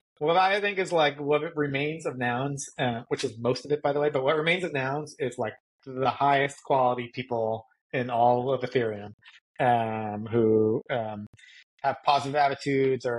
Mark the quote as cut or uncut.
uncut